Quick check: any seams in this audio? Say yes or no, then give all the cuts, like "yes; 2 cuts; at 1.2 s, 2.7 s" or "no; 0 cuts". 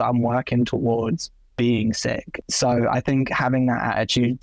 yes; 1 cut; at 2.3 s